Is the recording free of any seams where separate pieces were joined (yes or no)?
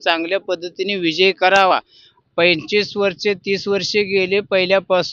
yes